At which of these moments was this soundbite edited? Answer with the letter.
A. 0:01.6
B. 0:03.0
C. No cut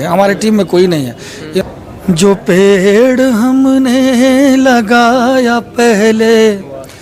A